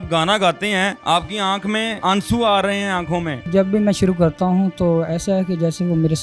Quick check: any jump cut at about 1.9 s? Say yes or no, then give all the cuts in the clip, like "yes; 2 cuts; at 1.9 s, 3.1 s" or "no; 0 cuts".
yes; 3 cuts; at 1.0 s, 1.9 s, 3.5 s